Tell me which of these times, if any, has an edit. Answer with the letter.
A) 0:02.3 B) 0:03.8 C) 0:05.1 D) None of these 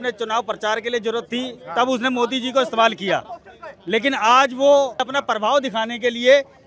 C